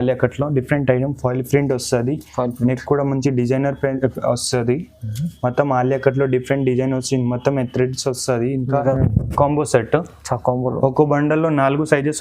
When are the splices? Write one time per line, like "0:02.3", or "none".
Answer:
0:08.9